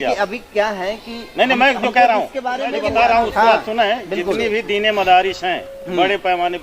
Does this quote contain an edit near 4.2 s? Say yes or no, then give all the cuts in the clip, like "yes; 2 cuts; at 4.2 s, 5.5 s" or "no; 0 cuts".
no; 1 cut; at 2.8 s